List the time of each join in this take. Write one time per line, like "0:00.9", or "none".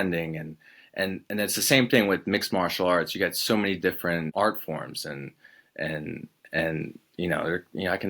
0:04.3